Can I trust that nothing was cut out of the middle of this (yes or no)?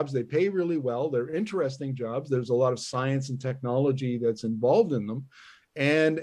yes